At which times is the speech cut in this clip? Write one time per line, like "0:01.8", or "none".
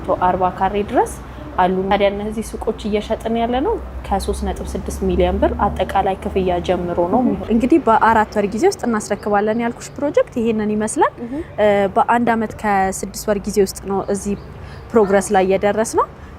0:01.9
0:07.4